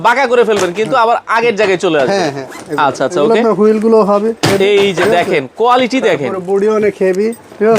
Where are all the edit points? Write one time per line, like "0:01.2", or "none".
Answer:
none